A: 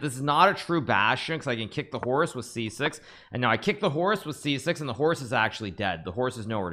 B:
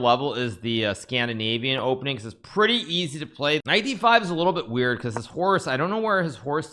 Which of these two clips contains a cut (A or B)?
B